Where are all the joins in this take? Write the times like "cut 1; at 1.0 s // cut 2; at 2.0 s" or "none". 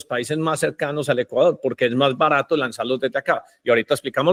none